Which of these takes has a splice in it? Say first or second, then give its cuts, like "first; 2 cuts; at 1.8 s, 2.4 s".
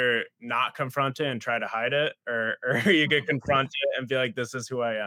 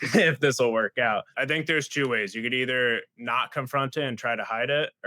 second; 1 cut; at 1.4 s